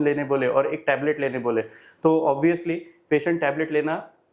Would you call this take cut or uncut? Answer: uncut